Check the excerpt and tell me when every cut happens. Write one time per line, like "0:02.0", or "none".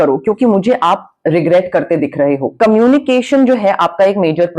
0:02.5